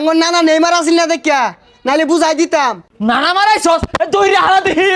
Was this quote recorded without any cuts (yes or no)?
no